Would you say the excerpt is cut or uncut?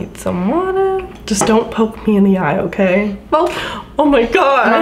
uncut